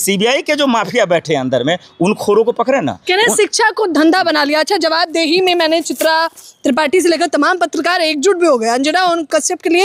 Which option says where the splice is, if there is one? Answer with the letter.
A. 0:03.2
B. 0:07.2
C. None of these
C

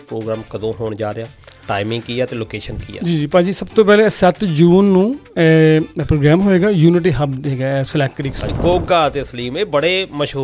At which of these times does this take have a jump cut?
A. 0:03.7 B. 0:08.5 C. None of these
B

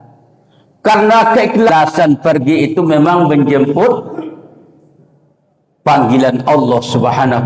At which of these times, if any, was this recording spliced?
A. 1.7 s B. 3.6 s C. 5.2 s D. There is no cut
A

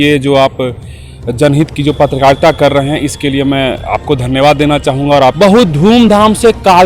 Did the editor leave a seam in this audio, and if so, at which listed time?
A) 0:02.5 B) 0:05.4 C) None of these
B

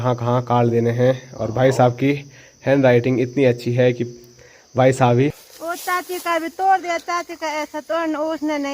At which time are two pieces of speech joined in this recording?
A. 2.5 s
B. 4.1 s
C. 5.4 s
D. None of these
C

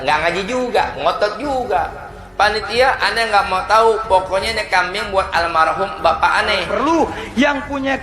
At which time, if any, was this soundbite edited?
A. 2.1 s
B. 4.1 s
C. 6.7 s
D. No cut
C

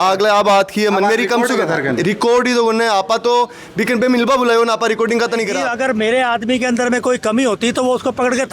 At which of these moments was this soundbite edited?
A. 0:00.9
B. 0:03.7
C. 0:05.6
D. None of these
C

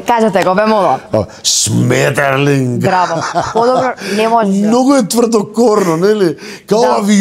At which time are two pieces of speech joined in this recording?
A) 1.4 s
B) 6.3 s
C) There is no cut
C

